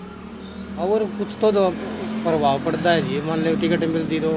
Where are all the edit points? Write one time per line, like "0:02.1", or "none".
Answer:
none